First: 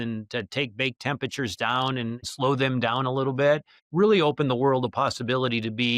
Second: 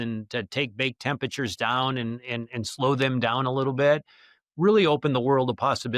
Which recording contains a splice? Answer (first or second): first